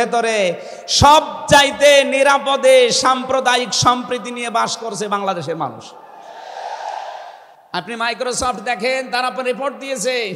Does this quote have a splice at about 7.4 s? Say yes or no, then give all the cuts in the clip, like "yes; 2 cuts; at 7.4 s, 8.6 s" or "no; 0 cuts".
yes; 1 cut; at 7.4 s